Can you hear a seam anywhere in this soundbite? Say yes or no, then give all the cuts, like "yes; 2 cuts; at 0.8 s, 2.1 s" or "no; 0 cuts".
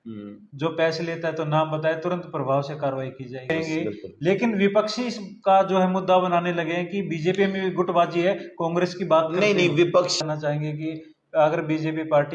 yes; 2 cuts; at 3.5 s, 10.2 s